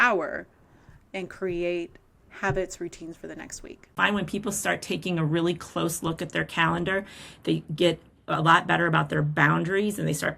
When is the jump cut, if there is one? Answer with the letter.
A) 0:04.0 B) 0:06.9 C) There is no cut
A